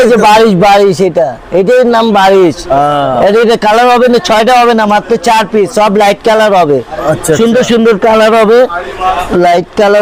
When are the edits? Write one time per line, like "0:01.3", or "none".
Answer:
none